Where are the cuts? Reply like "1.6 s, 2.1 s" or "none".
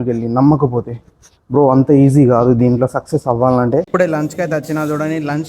3.9 s